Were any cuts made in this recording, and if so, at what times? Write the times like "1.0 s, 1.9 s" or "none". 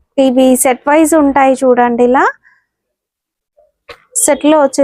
none